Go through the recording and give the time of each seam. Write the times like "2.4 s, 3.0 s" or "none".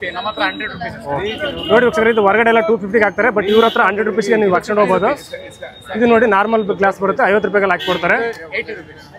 none